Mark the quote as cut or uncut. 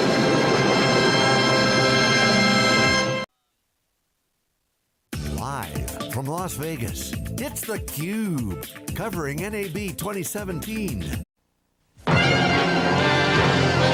uncut